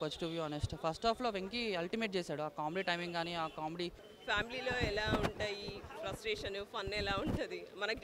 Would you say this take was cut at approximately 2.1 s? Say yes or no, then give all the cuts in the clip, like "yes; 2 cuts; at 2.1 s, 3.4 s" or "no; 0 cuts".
no; 1 cut; at 4.1 s